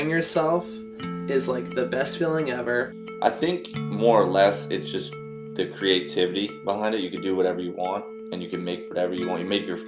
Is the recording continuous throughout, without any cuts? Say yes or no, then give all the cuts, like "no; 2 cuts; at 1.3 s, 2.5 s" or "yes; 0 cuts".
no; 1 cut; at 3.0 s